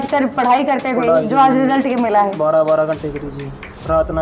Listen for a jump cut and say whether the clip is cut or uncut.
uncut